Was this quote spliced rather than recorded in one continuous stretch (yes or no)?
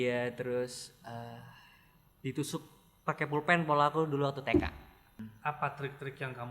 yes